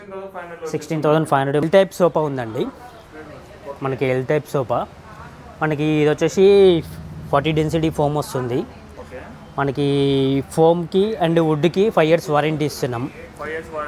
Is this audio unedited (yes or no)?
no